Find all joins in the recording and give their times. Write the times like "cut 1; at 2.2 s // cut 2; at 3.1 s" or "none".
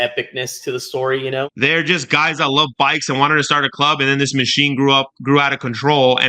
cut 1; at 1.5 s